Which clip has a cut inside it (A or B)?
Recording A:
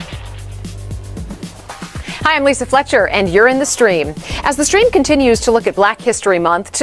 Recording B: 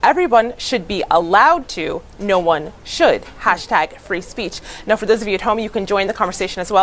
B